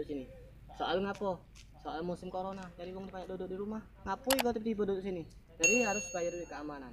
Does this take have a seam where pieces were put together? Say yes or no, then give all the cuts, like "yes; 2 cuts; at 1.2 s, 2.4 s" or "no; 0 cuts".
no; 0 cuts